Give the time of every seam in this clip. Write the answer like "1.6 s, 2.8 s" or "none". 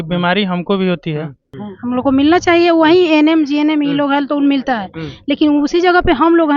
1.4 s